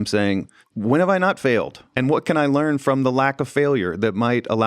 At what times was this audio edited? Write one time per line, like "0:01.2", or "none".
0:01.9